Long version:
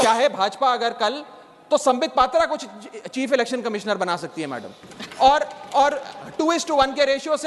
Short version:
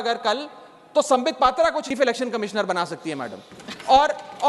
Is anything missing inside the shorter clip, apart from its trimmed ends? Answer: yes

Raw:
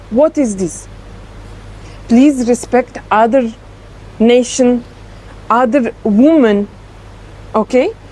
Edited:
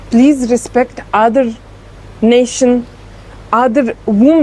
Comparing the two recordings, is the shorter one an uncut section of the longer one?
yes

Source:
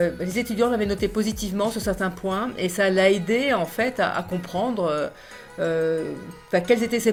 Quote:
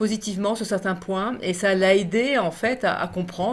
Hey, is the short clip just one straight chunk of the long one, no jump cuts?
yes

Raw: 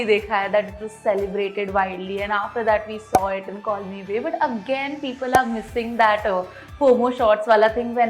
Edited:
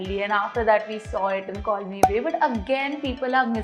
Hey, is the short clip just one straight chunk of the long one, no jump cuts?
yes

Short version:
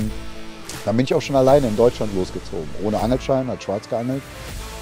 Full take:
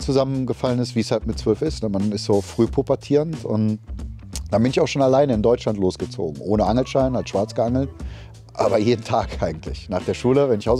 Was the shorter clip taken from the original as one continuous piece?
yes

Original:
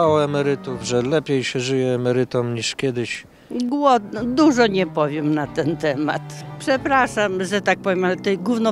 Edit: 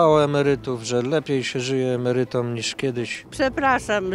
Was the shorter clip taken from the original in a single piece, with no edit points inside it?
no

